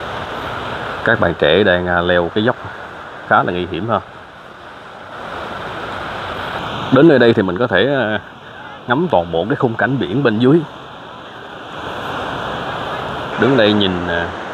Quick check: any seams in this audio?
yes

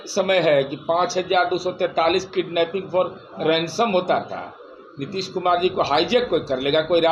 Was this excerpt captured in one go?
yes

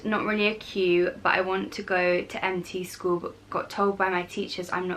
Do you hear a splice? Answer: no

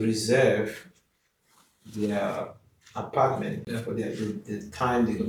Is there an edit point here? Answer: no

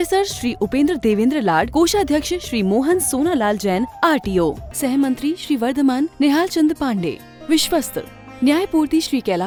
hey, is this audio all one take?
yes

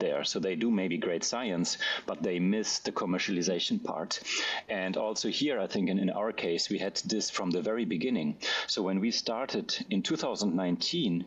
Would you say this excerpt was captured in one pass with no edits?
yes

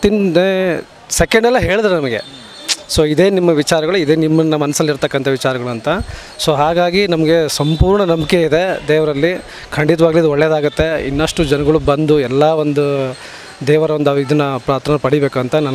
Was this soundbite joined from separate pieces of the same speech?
no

